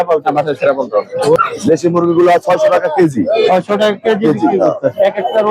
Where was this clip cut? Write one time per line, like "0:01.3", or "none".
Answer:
0:01.4